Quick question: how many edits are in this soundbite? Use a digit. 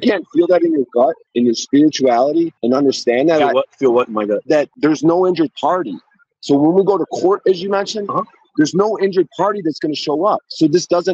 3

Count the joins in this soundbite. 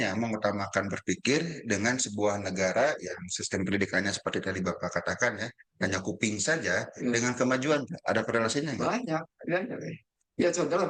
0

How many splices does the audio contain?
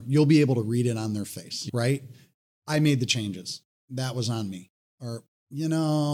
0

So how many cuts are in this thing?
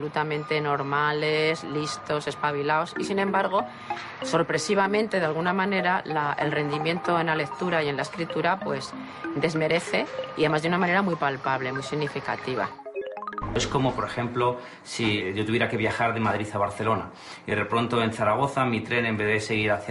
2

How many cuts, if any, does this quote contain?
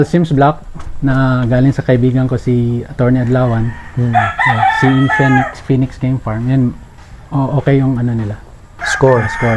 0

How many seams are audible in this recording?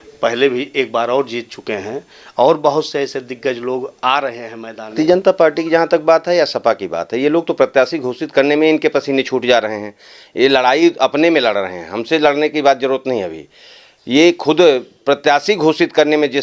1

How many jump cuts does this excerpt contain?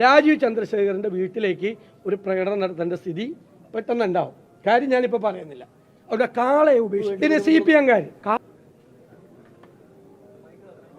1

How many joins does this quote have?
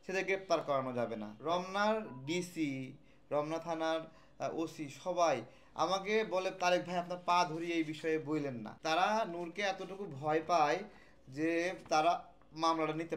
2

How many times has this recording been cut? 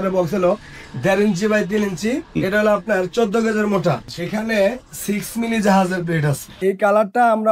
3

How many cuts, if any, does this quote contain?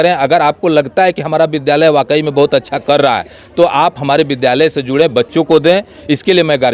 0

